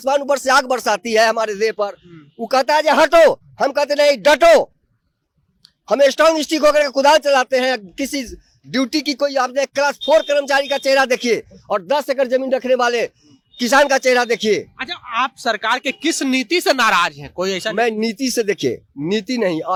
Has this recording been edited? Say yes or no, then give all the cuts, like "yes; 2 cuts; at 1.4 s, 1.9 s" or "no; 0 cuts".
no; 0 cuts